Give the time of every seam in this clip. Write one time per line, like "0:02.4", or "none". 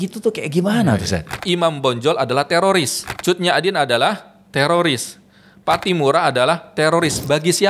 0:01.4
0:03.0

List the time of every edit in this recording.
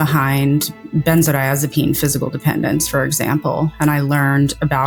none

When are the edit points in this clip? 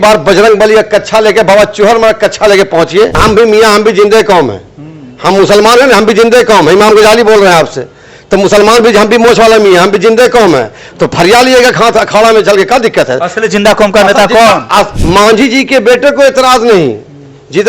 0:03.2
0:15.0

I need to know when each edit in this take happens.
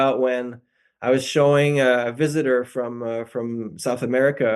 none

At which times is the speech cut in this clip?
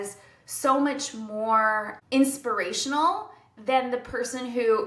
0:01.9

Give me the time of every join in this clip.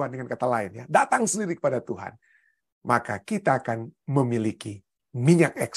none

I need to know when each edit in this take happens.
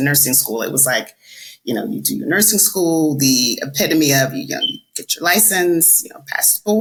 none

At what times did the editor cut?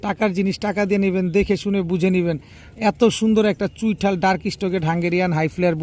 none

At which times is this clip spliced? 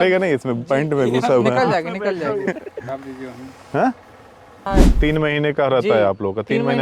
0:04.7

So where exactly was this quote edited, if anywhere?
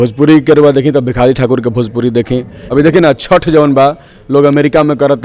0:02.6

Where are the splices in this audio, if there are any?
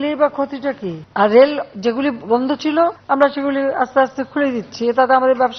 0:00.9
0:03.0

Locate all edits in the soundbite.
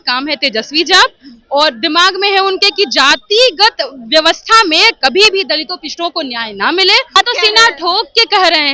0:07.2

